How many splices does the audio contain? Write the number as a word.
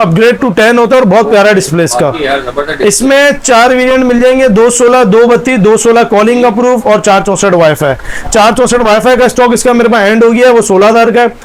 zero